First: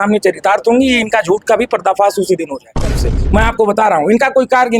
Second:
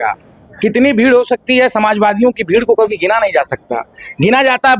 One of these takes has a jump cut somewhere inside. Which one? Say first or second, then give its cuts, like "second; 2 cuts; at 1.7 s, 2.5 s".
first; 1 cut; at 3.0 s